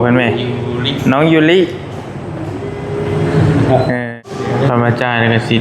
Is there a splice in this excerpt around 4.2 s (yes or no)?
yes